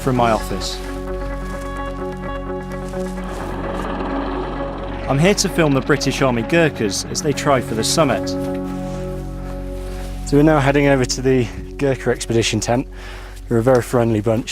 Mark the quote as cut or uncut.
cut